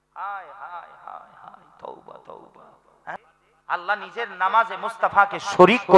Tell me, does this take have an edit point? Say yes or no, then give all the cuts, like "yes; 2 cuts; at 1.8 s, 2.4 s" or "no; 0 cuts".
yes; 1 cut; at 3.2 s